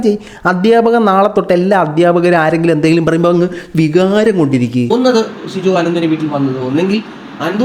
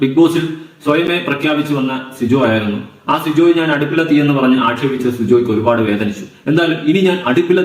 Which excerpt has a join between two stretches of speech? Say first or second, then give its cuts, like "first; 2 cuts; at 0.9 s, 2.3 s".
first; 1 cut; at 4.9 s